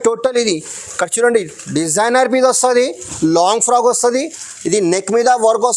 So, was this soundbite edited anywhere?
no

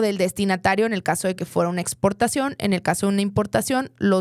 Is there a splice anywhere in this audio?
no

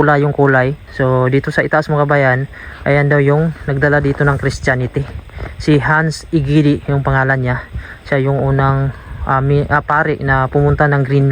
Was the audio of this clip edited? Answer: no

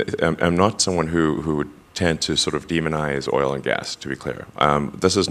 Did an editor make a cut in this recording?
no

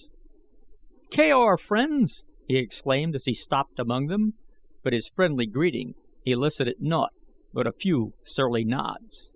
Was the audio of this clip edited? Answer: no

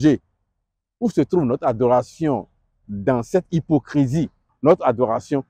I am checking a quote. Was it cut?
yes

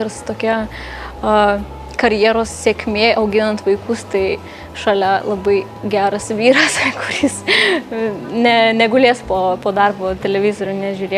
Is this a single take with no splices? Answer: yes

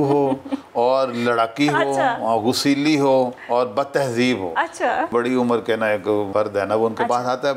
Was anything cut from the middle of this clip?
yes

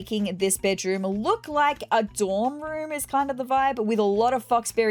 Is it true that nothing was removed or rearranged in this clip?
yes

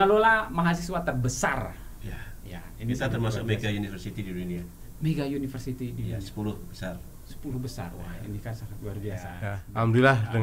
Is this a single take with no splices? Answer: no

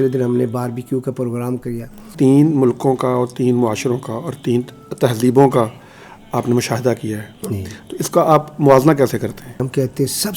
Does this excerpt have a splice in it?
yes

